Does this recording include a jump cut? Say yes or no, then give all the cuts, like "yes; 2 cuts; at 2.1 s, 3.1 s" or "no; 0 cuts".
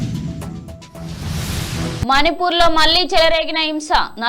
yes; 1 cut; at 2.0 s